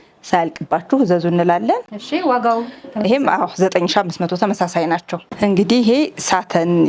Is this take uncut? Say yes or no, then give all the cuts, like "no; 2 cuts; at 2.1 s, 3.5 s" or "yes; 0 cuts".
yes; 0 cuts